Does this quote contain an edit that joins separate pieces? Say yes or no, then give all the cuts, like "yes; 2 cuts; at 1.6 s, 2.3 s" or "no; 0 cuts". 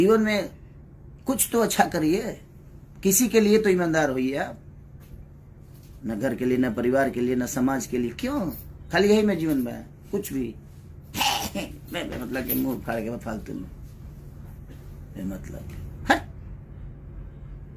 no; 0 cuts